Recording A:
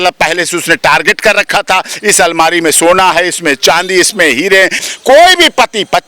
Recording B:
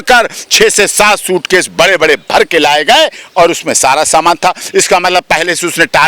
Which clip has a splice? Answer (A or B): A